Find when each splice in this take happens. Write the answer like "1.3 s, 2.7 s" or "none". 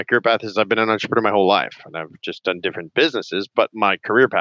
none